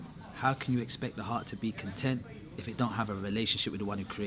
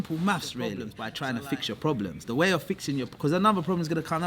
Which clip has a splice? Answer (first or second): second